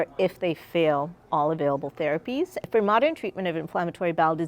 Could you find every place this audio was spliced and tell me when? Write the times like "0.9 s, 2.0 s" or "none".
2.6 s